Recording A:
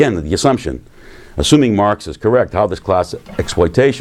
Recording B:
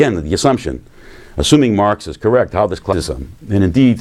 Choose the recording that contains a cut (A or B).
A